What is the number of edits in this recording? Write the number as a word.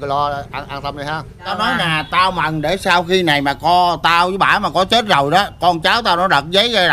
one